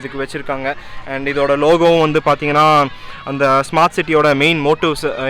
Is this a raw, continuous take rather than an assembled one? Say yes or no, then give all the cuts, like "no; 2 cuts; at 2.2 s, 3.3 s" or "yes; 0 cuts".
yes; 0 cuts